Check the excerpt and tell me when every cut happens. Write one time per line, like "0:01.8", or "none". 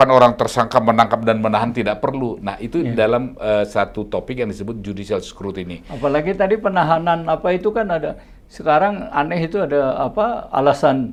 none